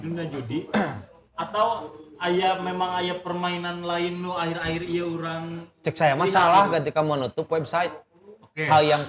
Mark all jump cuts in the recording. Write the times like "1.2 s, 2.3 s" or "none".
none